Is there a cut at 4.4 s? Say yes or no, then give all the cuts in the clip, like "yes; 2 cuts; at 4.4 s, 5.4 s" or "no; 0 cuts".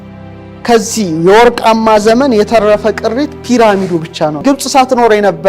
yes; 1 cut; at 4.4 s